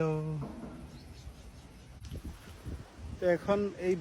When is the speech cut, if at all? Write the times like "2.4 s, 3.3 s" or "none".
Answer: 2.1 s